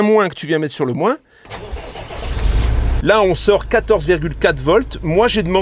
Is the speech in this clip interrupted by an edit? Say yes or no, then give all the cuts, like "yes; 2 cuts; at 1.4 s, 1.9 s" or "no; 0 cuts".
yes; 2 cuts; at 1.5 s, 2.9 s